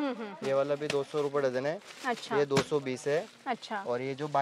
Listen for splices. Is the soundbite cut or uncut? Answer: uncut